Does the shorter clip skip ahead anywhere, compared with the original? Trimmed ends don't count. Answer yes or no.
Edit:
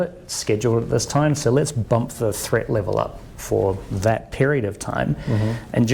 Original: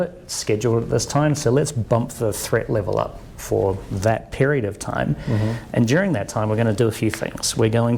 no